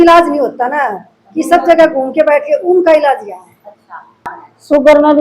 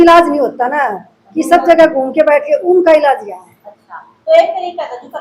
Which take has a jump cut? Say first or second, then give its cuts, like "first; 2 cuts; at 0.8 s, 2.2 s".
first; 1 cut; at 4.3 s